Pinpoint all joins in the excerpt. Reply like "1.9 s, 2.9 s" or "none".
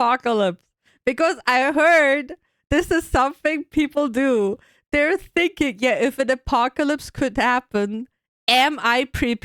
none